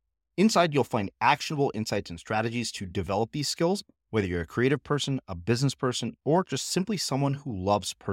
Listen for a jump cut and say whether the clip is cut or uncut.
uncut